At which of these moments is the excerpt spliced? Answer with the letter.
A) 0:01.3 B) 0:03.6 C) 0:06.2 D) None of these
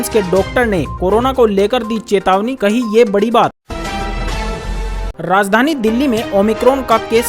B